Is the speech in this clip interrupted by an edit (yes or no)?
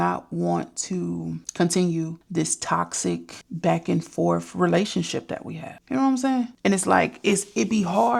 no